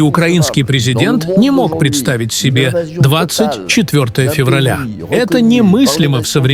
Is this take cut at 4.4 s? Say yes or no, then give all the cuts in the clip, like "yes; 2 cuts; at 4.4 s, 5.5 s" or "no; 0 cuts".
no; 0 cuts